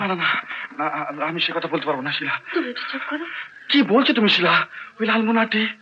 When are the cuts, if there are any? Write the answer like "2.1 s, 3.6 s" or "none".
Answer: none